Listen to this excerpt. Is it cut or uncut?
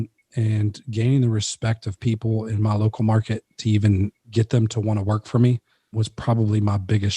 cut